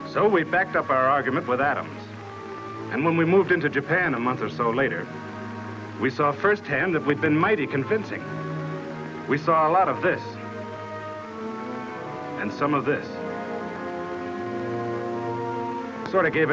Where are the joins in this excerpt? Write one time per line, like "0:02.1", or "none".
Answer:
0:06.5